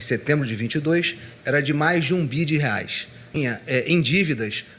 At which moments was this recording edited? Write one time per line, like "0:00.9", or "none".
0:03.4